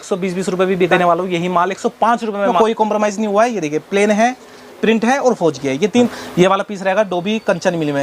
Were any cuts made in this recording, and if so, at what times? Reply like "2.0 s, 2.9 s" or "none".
0.9 s, 2.5 s, 6.1 s